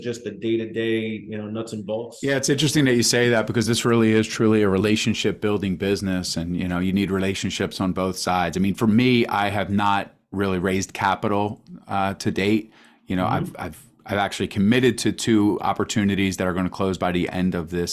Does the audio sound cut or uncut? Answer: cut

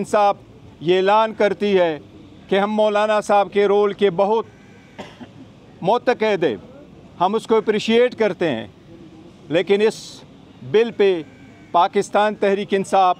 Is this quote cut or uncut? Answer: uncut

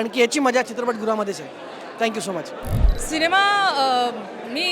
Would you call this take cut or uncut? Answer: uncut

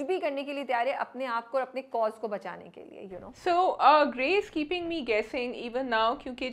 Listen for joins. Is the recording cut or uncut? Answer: uncut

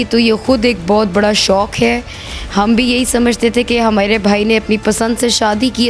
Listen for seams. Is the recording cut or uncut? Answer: uncut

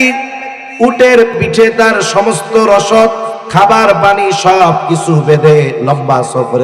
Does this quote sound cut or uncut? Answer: cut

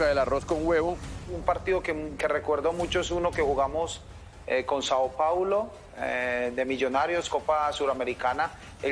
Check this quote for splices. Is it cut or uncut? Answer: cut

